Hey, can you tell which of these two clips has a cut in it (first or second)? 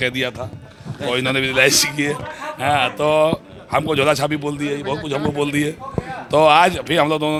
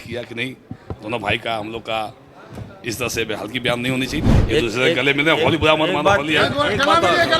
second